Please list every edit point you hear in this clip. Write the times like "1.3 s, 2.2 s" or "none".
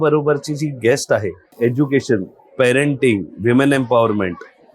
1.5 s